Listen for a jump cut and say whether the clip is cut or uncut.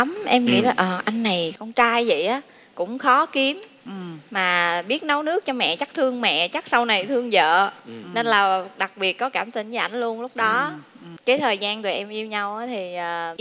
uncut